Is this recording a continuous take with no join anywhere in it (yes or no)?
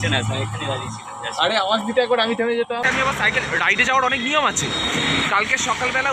no